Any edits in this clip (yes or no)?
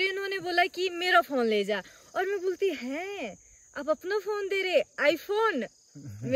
no